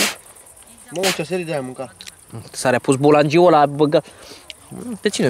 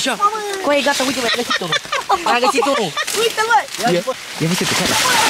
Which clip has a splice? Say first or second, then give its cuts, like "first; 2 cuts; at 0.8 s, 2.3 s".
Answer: second; 1 cut; at 4.3 s